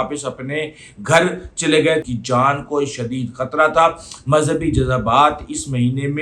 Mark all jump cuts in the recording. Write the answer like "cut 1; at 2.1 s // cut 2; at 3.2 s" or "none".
cut 1; at 2.0 s